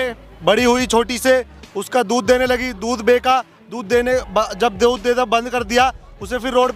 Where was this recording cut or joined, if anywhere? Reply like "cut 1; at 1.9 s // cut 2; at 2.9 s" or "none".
none